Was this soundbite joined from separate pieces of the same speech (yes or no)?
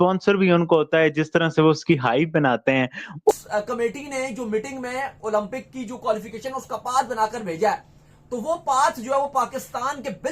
yes